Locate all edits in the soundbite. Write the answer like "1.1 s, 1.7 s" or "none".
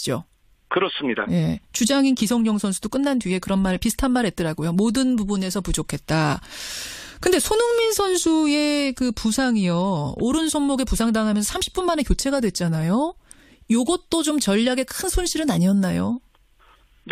none